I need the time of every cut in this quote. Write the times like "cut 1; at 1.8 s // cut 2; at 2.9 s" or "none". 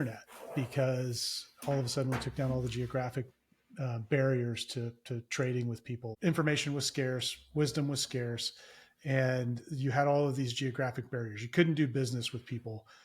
cut 1; at 6.2 s

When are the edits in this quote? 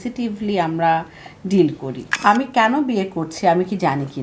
cut 1; at 2.1 s

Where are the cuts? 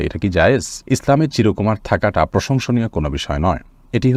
none

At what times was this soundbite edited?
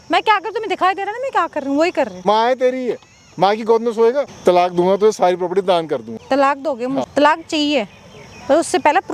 cut 1; at 2.2 s // cut 2; at 4.3 s // cut 3; at 6.1 s // cut 4; at 7.1 s

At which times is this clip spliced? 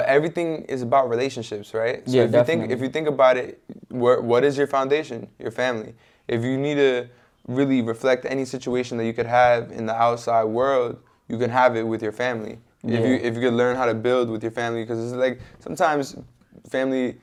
none

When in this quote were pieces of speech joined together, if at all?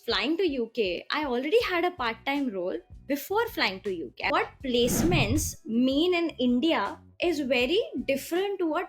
cut 1; at 4.3 s

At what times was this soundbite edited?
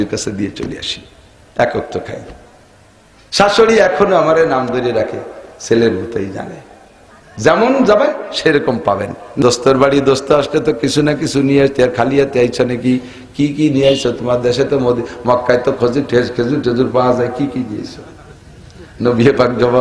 cut 1; at 9.3 s

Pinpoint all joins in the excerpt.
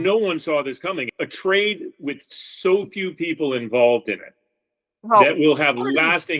cut 1; at 1.1 s

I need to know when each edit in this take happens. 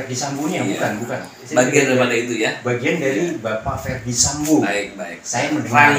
none

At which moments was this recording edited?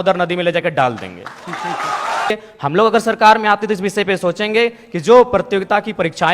cut 1; at 2.3 s

